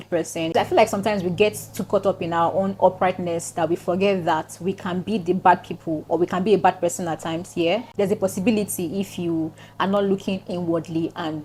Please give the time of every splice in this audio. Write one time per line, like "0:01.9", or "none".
none